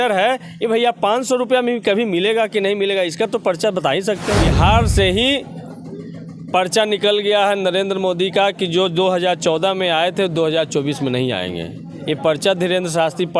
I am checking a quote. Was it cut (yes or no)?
yes